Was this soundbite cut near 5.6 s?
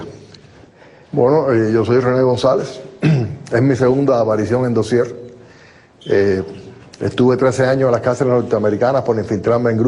no; 1 cut; at 2.0 s

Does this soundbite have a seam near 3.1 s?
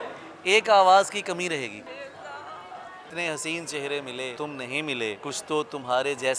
yes; 4 cuts; at 1.9 s, 3.1 s, 4.3 s, 5.2 s

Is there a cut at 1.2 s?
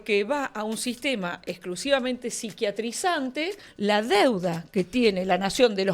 no; 1 cut; at 3.6 s

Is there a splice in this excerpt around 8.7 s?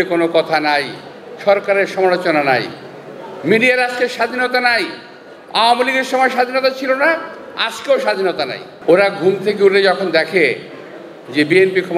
yes; 1 cut; at 8.7 s

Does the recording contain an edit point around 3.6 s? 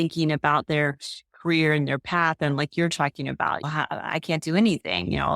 yes; 1 cut; at 3.6 s

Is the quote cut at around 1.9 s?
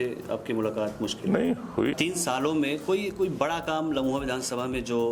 yes; 1 cut; at 1.9 s

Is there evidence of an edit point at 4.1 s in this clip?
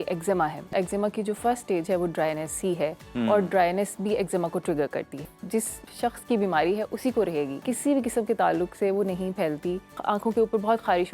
no; 4 cuts; at 0.7 s, 5.7 s, 7.6 s, 10.0 s

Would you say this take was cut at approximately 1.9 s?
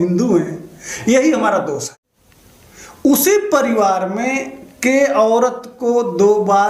yes; 1 cut; at 1.9 s

